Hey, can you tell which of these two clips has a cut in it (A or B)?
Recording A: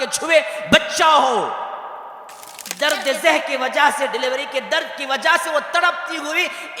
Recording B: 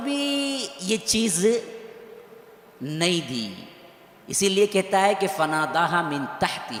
A